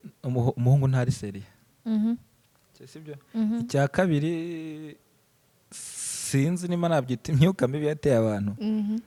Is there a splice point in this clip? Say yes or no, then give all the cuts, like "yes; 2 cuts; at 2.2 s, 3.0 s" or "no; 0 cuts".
no; 0 cuts